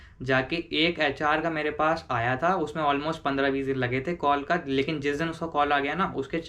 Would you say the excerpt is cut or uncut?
uncut